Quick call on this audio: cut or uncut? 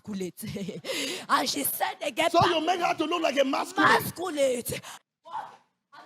cut